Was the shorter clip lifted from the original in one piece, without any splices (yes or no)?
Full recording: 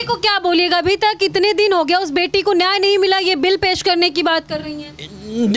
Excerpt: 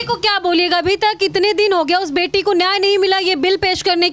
yes